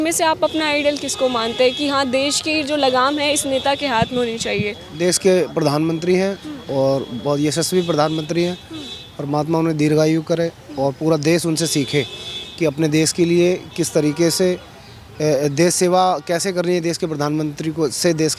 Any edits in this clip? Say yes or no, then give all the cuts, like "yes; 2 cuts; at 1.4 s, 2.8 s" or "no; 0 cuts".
no; 0 cuts